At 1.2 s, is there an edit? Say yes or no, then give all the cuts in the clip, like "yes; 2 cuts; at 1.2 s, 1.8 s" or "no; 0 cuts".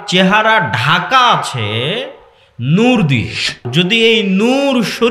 no; 1 cut; at 3.7 s